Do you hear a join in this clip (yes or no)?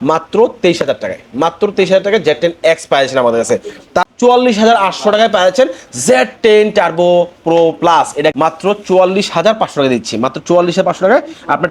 yes